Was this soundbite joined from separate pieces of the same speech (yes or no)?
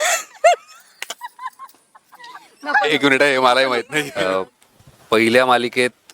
yes